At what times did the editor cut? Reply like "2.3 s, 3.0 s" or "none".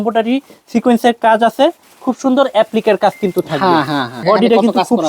1.9 s, 4.2 s